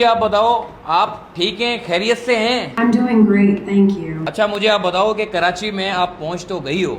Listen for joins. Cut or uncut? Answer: cut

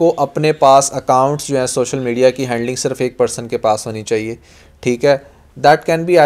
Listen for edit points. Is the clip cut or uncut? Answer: uncut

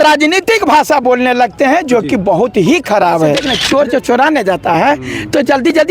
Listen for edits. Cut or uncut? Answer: cut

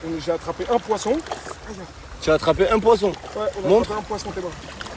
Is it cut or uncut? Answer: uncut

